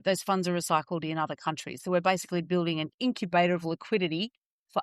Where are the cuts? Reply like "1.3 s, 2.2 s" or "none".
none